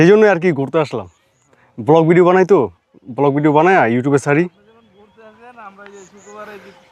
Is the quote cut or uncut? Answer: uncut